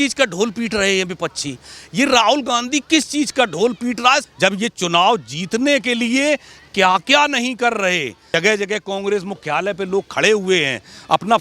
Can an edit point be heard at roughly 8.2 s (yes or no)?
yes